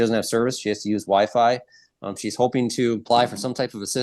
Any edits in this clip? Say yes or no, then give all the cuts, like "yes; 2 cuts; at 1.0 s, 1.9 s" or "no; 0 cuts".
yes; 1 cut; at 3.0 s